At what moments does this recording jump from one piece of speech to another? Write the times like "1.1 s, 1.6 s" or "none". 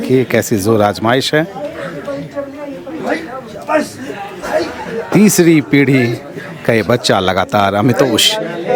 none